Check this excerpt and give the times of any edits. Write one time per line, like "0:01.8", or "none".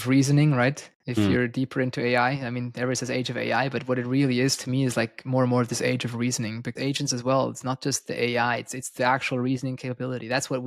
0:06.7